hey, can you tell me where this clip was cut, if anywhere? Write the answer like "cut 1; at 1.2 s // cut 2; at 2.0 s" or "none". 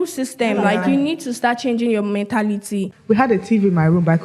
cut 1; at 2.9 s